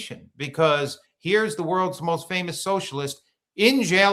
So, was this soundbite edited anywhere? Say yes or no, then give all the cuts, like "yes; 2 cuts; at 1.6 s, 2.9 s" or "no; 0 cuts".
no; 0 cuts